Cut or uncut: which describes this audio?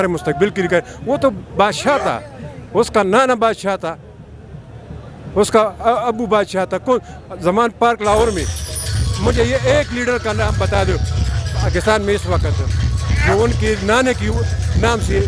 uncut